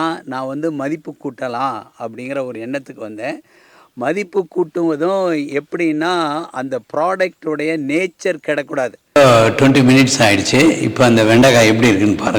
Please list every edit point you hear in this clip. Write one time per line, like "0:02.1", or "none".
0:09.2